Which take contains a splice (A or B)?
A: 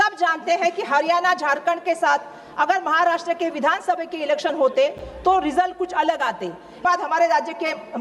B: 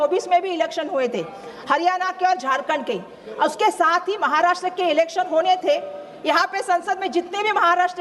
A